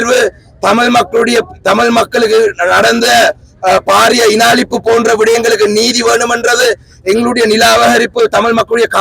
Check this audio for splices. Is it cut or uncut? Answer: uncut